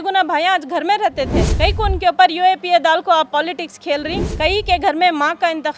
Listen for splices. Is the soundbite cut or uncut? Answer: cut